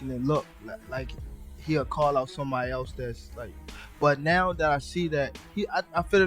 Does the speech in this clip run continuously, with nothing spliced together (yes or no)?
yes